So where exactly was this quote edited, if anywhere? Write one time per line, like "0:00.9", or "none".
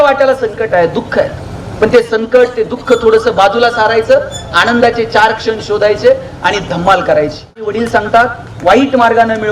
0:07.7